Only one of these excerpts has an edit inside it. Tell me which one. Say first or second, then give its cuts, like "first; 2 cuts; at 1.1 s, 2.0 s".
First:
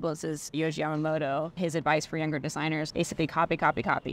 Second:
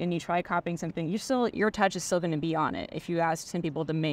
first; 2 cuts; at 1.6 s, 2.9 s